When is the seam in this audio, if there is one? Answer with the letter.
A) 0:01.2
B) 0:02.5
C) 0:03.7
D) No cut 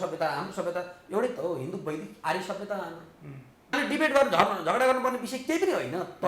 C